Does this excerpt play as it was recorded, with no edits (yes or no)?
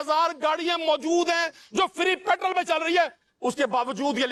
yes